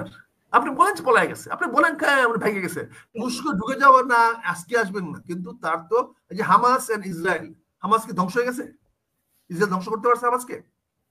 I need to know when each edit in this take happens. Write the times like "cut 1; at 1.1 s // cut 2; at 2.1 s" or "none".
cut 1; at 3.1 s